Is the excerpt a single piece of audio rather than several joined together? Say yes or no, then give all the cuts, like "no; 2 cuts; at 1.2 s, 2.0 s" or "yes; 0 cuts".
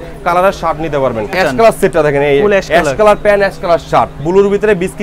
no; 2 cuts; at 1.3 s, 4.2 s